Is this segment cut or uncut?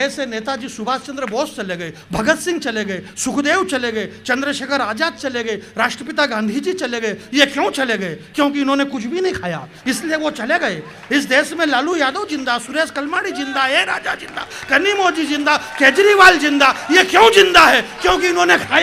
uncut